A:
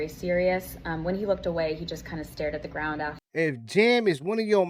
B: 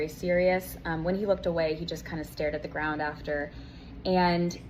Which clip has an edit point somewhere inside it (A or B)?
A